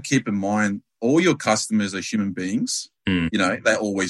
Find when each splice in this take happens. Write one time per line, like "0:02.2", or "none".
none